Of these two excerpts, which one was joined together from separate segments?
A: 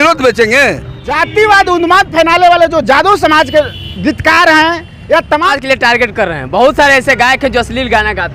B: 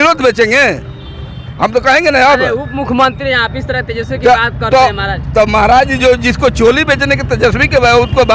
A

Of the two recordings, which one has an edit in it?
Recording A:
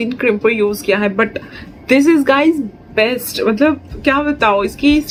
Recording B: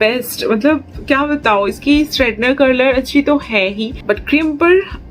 B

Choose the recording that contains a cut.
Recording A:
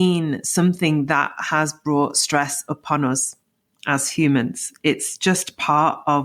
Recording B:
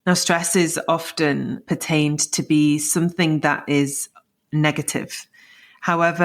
B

